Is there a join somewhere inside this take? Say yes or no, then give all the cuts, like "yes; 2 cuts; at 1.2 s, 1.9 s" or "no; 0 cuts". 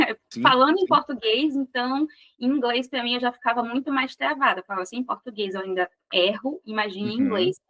no; 0 cuts